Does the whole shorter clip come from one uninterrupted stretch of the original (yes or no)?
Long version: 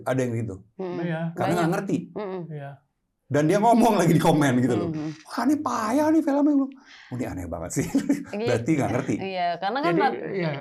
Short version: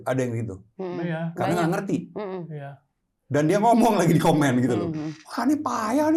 yes